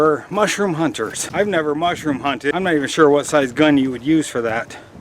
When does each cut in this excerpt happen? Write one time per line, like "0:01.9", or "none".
0:01.2
0:02.5